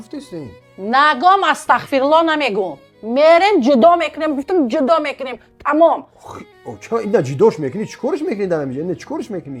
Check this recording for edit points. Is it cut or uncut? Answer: uncut